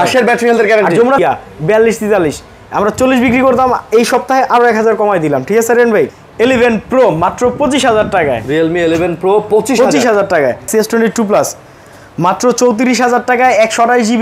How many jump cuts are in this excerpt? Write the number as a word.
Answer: three